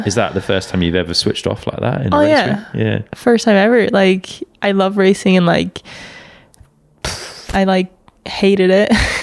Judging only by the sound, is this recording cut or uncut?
cut